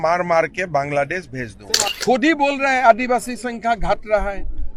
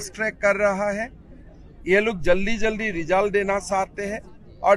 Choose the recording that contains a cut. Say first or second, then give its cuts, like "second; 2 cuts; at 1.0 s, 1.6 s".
first; 1 cut; at 2.0 s